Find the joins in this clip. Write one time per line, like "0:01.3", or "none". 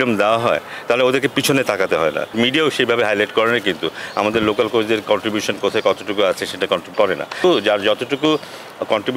0:02.3
0:07.4